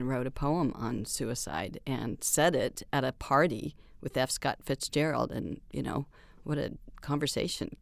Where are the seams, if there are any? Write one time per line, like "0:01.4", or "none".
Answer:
none